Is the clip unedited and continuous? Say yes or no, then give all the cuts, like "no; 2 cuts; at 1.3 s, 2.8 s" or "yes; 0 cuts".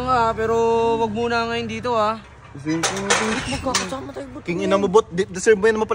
yes; 0 cuts